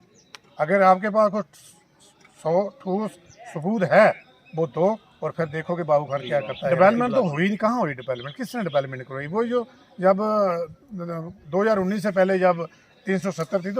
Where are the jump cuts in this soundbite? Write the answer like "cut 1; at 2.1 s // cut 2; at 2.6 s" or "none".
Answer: cut 1; at 6.7 s